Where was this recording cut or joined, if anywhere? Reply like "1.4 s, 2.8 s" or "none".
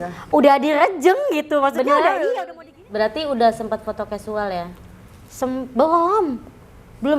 2.4 s